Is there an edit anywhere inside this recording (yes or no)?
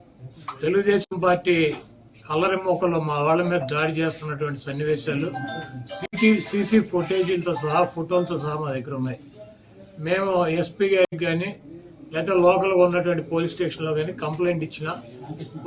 no